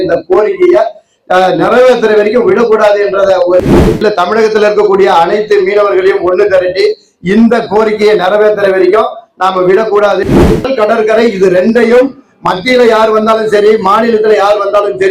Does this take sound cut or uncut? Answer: cut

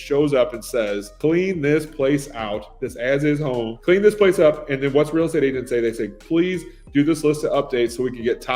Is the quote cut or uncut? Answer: cut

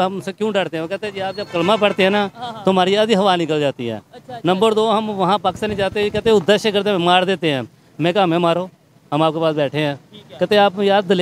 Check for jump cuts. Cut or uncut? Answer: uncut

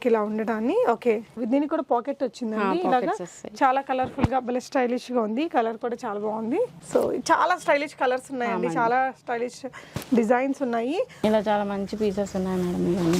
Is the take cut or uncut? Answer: cut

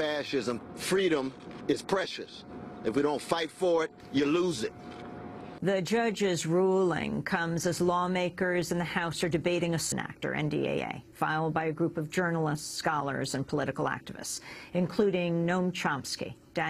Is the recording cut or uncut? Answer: uncut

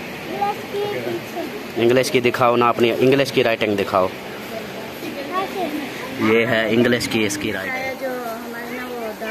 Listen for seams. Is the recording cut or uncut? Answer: cut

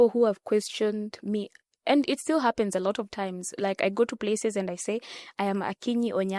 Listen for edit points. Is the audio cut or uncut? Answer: uncut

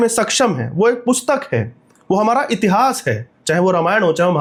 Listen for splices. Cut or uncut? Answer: uncut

